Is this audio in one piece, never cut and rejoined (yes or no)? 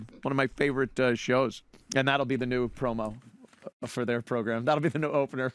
no